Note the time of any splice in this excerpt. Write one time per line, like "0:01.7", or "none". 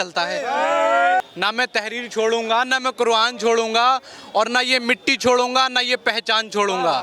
0:01.2